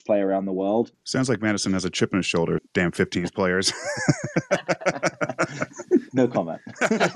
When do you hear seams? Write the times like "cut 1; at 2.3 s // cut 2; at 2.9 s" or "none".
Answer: cut 1; at 1.0 s // cut 2; at 2.7 s // cut 3; at 6.1 s